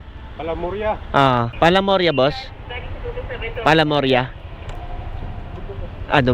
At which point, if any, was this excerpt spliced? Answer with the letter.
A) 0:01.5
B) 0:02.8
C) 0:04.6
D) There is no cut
A